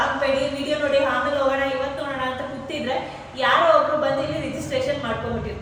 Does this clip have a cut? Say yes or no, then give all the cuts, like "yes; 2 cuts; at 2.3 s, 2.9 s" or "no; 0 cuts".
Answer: no; 0 cuts